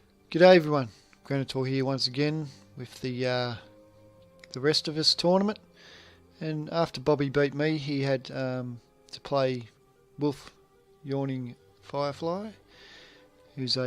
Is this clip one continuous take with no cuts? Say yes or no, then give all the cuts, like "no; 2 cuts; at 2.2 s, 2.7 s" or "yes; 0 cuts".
no; 1 cut; at 11.0 s